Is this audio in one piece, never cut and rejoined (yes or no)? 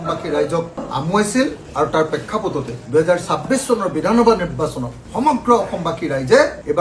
yes